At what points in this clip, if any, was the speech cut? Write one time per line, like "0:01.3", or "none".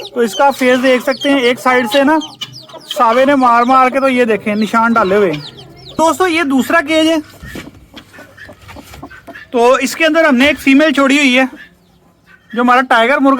0:05.8